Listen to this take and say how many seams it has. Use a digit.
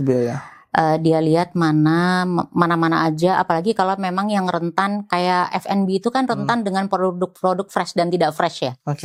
0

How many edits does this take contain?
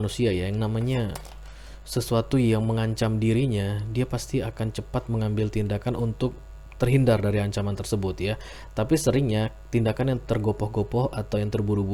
0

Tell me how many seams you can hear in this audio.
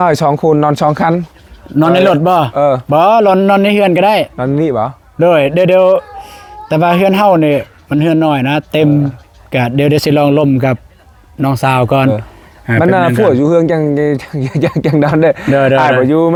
0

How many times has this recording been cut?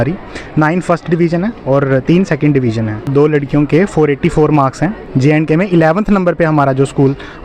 1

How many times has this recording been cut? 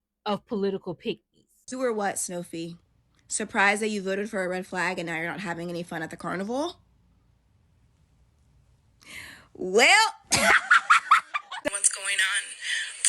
2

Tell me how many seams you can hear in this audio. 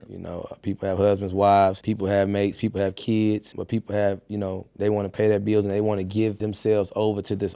3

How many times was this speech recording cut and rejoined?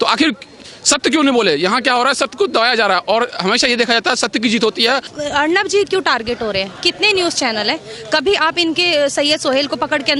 1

